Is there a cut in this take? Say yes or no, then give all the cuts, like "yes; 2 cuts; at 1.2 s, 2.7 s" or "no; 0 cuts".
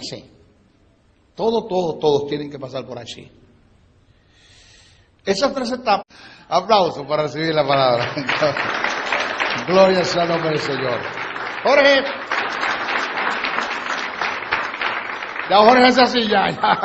no; 0 cuts